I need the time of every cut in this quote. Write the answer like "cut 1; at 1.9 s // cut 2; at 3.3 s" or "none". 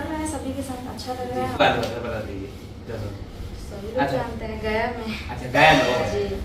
cut 1; at 1.6 s